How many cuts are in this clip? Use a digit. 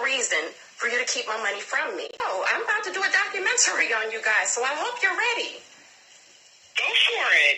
1